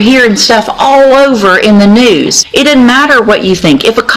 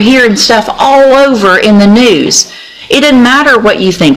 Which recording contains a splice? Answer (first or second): first